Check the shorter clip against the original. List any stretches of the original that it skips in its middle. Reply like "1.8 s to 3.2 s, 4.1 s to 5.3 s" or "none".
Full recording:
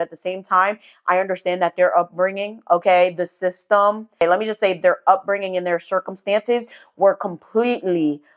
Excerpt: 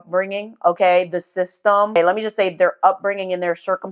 4.0 s to 4.1 s